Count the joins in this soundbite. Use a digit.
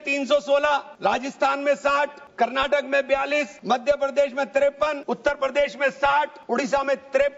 5